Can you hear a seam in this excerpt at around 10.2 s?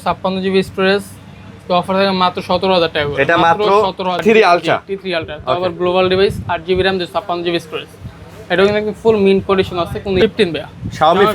yes; 2 cuts; at 4.2 s, 10.2 s

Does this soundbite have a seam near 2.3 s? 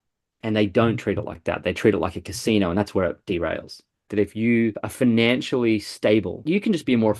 no; 3 cuts; at 4.1 s, 4.8 s, 6.4 s

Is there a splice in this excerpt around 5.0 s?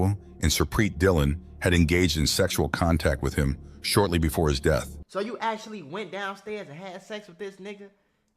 yes; 1 cut; at 5.0 s

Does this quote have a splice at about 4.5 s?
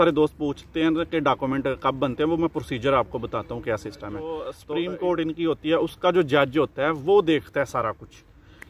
yes; 1 cut; at 4.5 s

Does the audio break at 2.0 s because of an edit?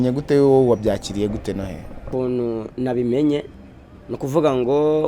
yes; 1 cut; at 2.0 s

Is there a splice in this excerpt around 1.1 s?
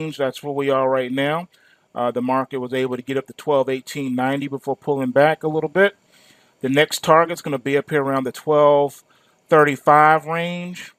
no; 1 cut; at 2.8 s

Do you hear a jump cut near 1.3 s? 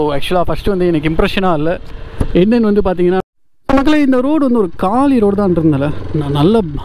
no; 1 cut; at 3.2 s

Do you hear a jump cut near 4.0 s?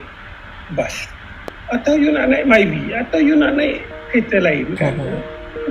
no; 1 cut; at 1.5 s

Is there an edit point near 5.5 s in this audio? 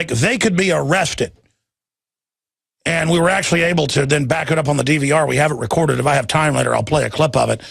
yes; 1 cut; at 5.5 s

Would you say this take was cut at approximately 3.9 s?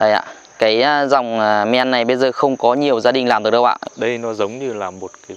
yes; 1 cut; at 3.9 s

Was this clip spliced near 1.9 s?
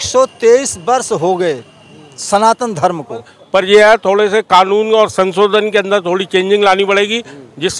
no; 1 cut; at 3.4 s

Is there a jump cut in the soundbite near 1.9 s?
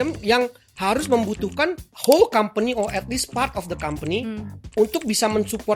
yes; 1 cut; at 1.9 s

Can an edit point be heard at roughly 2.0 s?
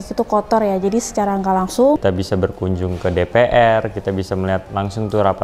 yes; 1 cut; at 2.0 s

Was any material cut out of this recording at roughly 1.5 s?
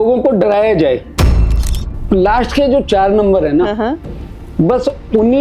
yes; 1 cut; at 1.5 s

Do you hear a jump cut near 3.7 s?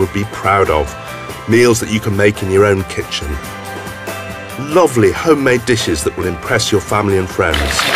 no; 0 cuts

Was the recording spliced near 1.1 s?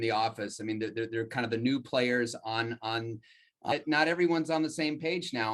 no; 1 cut; at 3.7 s

